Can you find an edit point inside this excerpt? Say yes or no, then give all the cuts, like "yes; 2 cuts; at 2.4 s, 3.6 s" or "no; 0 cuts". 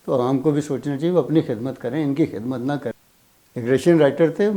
yes; 1 cut; at 2.9 s